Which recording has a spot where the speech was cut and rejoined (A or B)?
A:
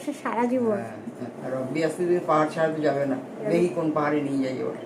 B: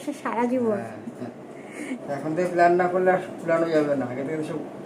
A